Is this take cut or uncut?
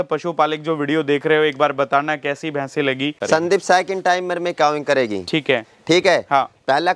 cut